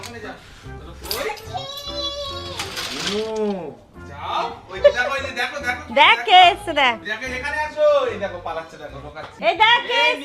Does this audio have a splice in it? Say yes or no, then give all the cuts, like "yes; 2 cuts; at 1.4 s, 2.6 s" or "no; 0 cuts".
yes; 1 cut; at 9.3 s